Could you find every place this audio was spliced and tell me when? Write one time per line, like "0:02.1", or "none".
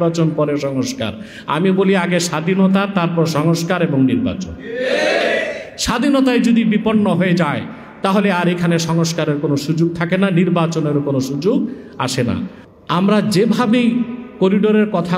0:12.6